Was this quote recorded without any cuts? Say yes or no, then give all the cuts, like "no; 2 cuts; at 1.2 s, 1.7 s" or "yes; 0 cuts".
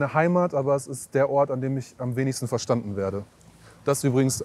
yes; 0 cuts